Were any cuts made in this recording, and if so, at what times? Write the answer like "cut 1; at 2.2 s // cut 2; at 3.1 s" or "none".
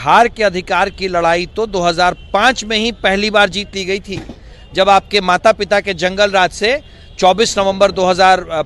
none